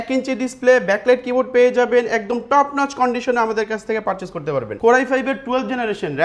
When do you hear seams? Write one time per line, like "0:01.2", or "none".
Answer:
0:04.8